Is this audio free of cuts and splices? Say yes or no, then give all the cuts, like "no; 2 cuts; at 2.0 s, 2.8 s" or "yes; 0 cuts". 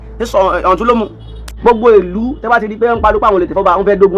no; 1 cut; at 1.6 s